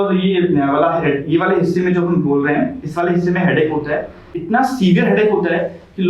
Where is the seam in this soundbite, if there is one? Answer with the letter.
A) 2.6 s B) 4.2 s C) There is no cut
B